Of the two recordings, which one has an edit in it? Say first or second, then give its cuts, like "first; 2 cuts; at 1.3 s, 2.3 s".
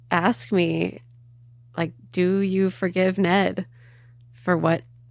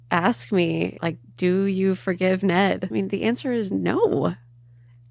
second; 2 cuts; at 1.0 s, 2.8 s